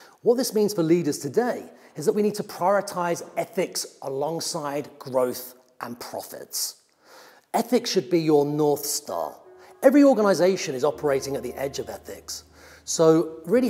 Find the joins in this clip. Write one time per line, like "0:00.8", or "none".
none